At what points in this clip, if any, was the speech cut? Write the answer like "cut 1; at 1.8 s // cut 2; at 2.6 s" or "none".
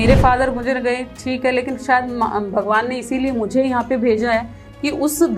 none